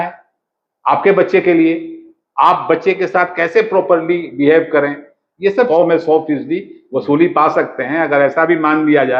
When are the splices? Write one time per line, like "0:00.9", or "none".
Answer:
0:05.7